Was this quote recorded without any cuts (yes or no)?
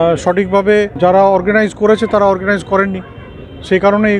no